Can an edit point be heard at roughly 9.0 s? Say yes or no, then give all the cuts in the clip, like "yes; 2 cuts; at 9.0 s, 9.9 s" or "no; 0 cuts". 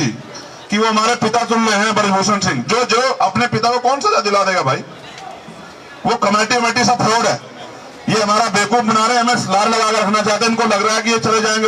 no; 0 cuts